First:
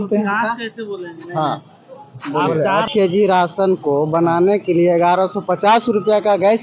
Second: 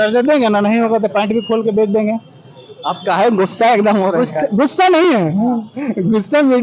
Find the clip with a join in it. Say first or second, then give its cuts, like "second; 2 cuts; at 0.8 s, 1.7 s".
first; 1 cut; at 2.9 s